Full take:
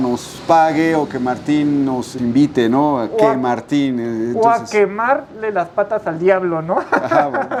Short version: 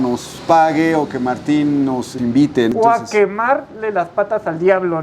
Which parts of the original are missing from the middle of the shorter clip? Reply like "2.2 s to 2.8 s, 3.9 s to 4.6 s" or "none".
2.7 s to 4.3 s